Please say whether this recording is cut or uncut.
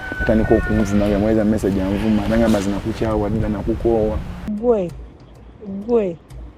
cut